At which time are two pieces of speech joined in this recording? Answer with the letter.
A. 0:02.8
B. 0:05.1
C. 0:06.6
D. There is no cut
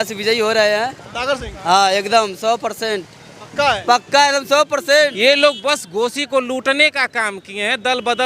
B